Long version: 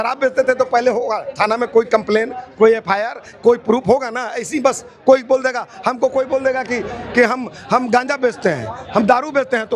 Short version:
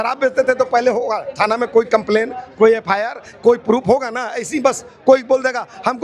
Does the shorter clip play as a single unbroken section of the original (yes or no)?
yes